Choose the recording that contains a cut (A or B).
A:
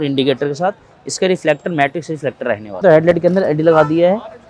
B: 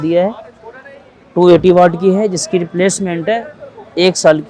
A